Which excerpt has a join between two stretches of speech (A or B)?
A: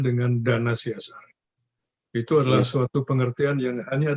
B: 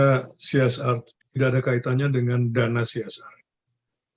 B